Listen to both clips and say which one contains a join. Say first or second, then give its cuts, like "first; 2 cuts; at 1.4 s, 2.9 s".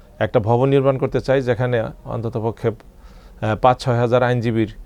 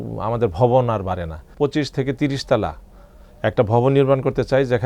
second; 1 cut; at 1.5 s